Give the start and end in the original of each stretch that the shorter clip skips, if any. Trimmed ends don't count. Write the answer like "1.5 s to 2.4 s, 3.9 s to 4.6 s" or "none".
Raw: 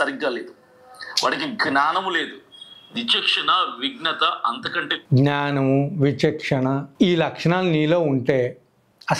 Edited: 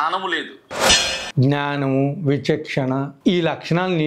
2.9 s to 4.8 s